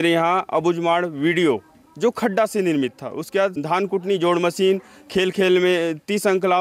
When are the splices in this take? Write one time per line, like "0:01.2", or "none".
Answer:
0:03.6